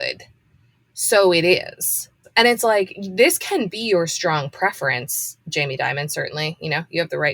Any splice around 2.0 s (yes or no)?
yes